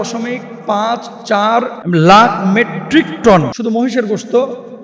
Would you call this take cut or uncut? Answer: cut